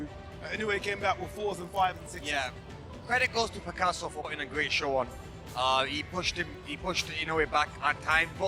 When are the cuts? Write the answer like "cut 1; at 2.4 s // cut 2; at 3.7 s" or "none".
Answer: cut 1; at 4.3 s